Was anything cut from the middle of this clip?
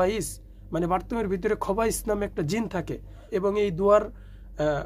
yes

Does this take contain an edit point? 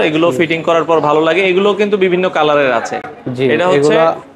no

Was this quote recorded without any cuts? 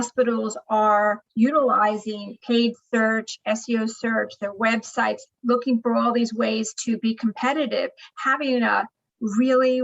no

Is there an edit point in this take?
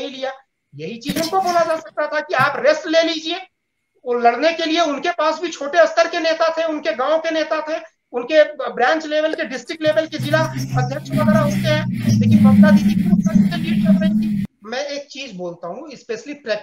yes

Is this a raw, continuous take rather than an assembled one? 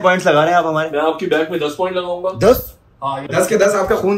yes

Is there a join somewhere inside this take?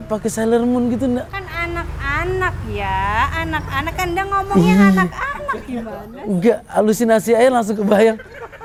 no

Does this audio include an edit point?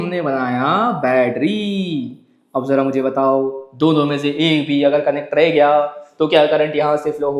no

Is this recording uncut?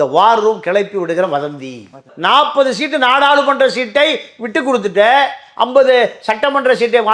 yes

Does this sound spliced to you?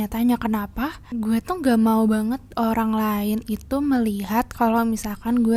no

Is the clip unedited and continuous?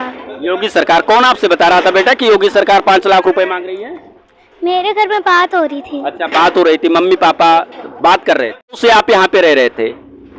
no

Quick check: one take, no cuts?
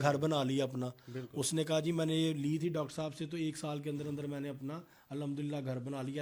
yes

